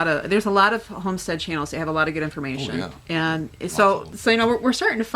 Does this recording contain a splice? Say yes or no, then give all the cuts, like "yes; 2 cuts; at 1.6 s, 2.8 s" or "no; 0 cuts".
yes; 1 cut; at 4.1 s